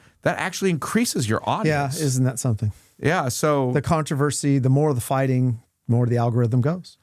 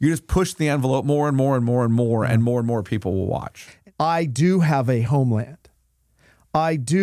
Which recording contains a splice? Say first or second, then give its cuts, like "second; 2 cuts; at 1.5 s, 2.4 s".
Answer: second; 1 cut; at 3.6 s